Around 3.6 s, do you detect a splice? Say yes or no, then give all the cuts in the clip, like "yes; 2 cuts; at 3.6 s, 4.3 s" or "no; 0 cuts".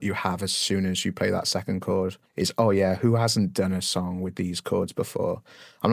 no; 1 cut; at 2.2 s